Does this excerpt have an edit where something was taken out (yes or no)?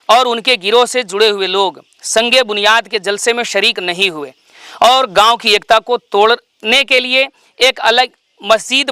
no